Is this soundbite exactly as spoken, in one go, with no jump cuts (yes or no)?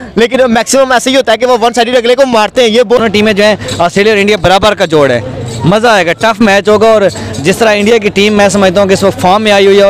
no